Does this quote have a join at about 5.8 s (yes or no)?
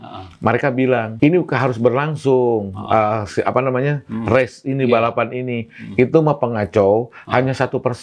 no